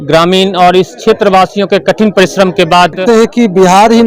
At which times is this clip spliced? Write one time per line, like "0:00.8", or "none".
0:03.0